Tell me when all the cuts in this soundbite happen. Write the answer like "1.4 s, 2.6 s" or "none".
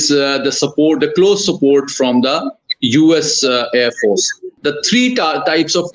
4.4 s